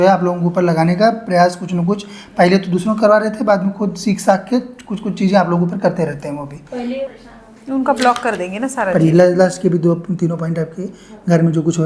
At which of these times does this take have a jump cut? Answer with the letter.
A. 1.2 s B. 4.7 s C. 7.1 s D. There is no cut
C